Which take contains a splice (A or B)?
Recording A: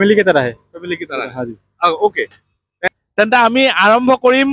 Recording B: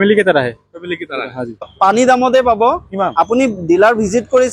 B